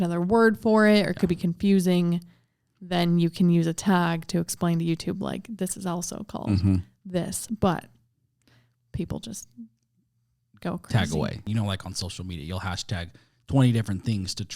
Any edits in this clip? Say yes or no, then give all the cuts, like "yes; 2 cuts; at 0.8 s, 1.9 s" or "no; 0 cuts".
yes; 1 cut; at 11.4 s